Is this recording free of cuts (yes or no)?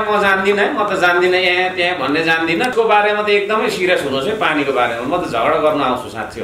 no